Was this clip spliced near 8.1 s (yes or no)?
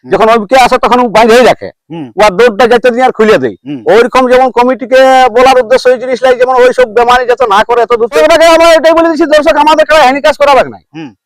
yes